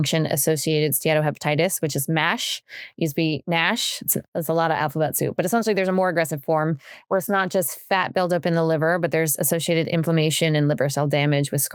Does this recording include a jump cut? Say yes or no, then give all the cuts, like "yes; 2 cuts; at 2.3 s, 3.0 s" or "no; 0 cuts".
no; 0 cuts